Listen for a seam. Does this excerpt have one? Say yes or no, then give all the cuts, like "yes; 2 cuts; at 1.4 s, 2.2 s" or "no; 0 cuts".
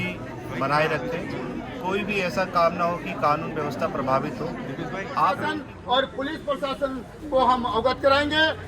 yes; 1 cut; at 5.4 s